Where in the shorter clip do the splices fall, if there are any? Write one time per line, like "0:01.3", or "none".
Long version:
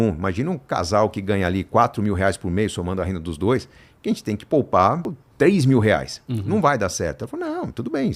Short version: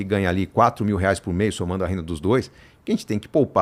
none